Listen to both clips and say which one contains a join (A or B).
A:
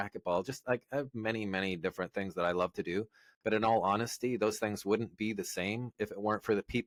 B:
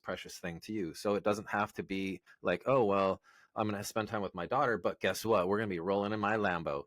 B